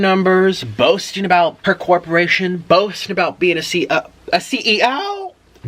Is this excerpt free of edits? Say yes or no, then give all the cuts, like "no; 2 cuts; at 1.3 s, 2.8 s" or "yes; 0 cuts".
no; 1 cut; at 1.6 s